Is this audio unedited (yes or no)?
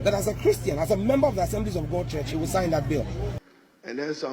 no